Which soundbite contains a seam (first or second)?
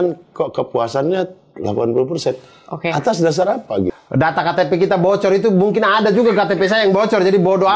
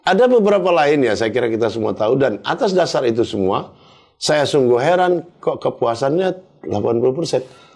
first